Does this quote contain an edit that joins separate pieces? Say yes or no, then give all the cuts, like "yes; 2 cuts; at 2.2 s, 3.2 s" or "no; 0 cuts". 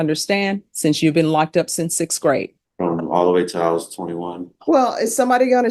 yes; 1 cut; at 2.6 s